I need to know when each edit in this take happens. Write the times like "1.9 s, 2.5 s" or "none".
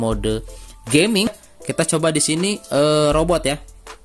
1.3 s